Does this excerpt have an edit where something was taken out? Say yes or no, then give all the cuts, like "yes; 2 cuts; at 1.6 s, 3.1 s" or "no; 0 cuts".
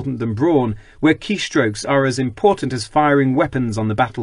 no; 0 cuts